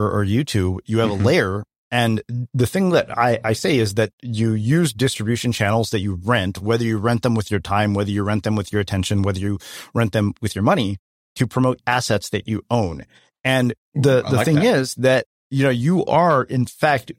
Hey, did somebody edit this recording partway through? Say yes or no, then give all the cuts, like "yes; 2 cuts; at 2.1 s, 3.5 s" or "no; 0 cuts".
no; 0 cuts